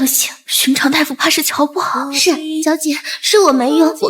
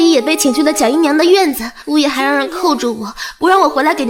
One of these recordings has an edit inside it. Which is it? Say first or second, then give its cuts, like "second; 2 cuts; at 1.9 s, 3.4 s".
first; 1 cut; at 2.5 s